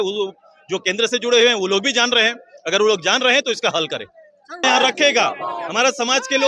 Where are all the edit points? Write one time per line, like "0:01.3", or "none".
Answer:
0:04.6